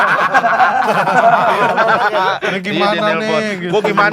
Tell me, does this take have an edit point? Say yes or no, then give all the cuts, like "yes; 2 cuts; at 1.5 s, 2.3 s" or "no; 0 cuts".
yes; 2 cuts; at 1.5 s, 2.5 s